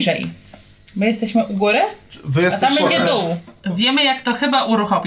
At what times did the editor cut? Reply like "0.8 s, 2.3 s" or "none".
3.5 s